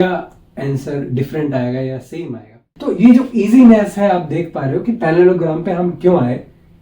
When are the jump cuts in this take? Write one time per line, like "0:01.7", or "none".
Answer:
0:02.7